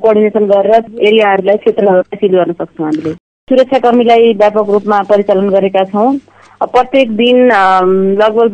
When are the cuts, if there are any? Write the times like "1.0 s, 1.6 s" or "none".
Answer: 0.8 s, 3.3 s